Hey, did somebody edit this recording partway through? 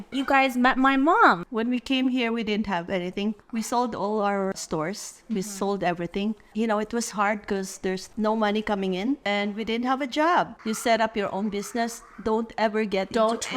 yes; 5 cuts; at 1.4 s, 4.5 s, 6.5 s, 9.2 s, 10.6 s

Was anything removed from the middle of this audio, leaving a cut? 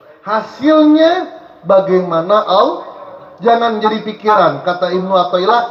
no; 0 cuts

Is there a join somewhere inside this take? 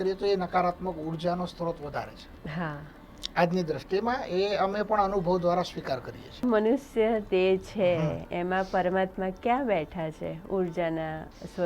yes; 1 cut; at 6.4 s

